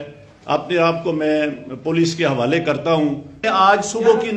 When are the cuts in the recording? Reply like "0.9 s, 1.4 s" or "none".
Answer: 3.5 s

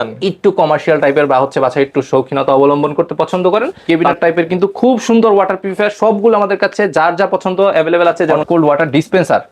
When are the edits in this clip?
3.8 s, 8.3 s

